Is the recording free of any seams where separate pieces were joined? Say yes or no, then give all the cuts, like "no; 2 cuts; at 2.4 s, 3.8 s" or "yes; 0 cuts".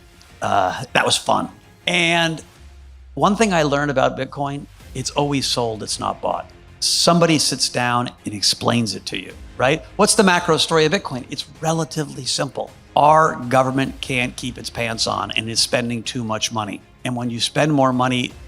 no; 1 cut; at 1.7 s